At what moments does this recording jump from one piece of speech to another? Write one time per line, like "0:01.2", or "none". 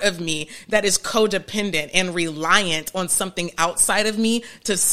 none